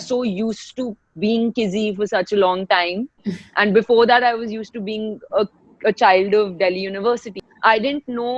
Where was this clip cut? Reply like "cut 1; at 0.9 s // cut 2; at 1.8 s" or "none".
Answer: cut 1; at 7.4 s